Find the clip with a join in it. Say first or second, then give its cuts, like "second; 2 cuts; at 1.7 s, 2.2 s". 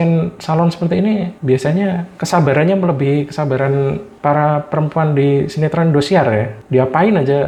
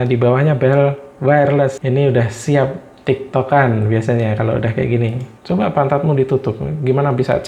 second; 2 cuts; at 1.8 s, 5.3 s